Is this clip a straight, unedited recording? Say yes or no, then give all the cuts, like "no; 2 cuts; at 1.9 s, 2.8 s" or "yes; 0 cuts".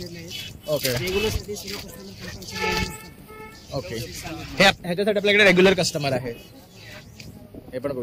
yes; 0 cuts